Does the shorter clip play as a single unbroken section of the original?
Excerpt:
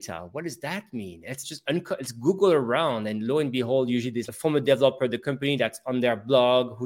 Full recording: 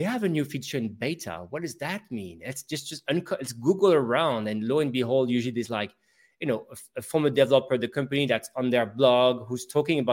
no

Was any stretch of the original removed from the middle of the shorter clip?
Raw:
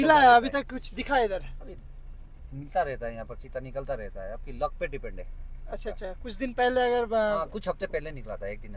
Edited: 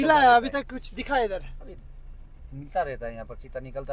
no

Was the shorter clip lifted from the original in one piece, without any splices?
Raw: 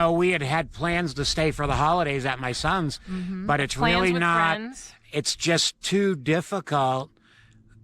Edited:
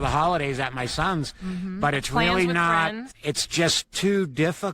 no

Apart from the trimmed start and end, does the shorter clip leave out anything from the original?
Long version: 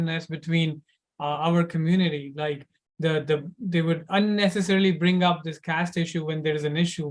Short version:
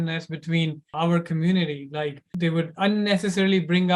yes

